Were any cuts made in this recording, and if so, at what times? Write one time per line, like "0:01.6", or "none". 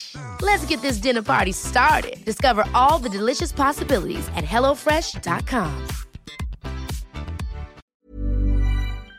0:07.8